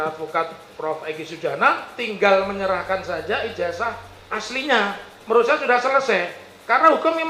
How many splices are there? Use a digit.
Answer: 0